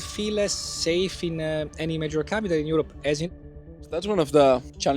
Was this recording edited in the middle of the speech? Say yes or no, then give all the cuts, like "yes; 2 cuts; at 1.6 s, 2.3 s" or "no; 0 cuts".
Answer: yes; 1 cut; at 3.3 s